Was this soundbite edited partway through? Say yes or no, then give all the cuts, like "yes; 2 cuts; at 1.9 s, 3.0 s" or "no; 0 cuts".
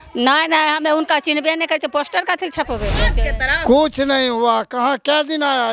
yes; 1 cut; at 3.1 s